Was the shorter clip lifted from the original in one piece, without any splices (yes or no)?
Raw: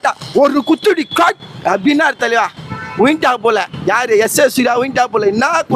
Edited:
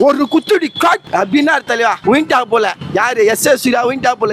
no